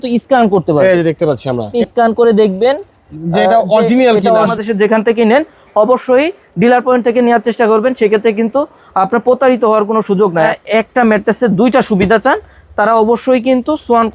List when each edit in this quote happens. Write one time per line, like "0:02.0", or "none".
0:01.7
0:04.5
0:10.5